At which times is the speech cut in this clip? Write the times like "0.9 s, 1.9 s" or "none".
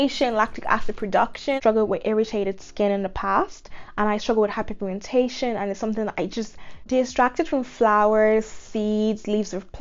1.6 s, 6.7 s